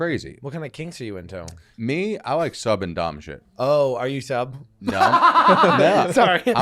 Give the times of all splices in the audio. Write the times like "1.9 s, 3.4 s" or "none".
1.7 s